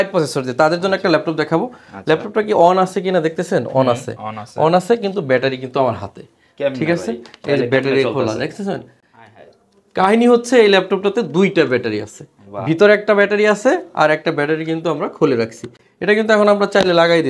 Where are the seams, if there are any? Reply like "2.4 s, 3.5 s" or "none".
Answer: none